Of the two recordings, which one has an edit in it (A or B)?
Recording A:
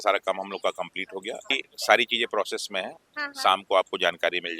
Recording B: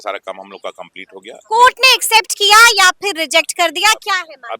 A